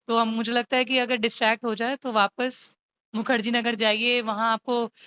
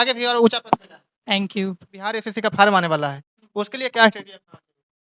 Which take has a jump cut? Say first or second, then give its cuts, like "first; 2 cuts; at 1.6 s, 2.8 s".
second; 1 cut; at 2.2 s